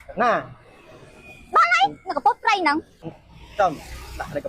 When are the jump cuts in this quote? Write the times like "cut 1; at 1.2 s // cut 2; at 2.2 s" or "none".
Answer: cut 1; at 2.9 s